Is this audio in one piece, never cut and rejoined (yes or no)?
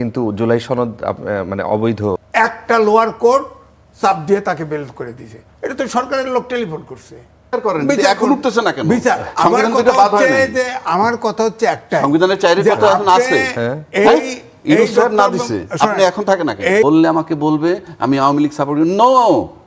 no